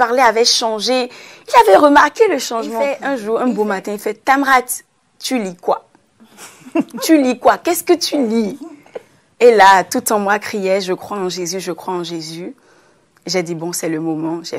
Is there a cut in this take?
yes; 1 cut; at 2.9 s

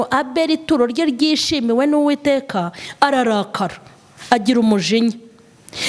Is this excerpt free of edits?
yes; 0 cuts

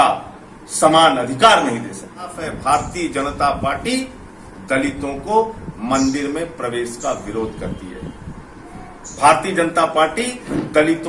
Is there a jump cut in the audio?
yes; 1 cut; at 2.5 s

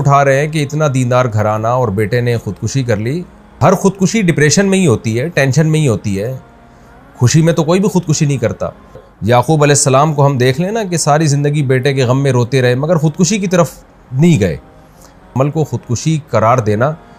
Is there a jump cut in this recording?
yes; 3 cuts; at 3.6 s, 9.1 s, 15.3 s

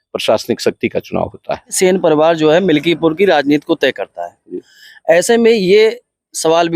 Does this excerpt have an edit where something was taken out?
yes; 1 cut; at 1.8 s

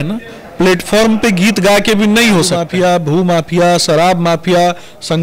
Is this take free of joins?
no; 1 cut; at 2.6 s

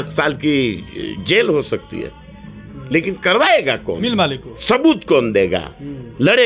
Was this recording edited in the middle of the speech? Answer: no; 0 cuts

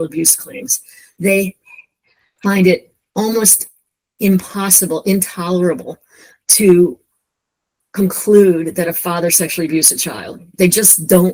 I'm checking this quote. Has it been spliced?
no; 0 cuts

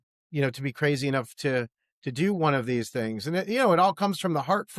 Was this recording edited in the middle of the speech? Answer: no; 0 cuts

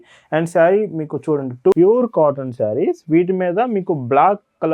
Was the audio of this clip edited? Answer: yes; 1 cut; at 1.7 s

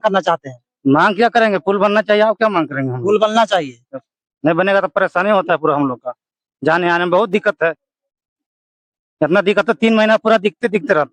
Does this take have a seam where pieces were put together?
no; 0 cuts

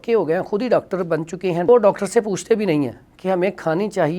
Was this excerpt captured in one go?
no; 1 cut; at 1.7 s

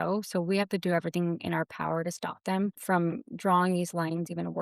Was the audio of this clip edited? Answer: yes; 1 cut; at 2.8 s

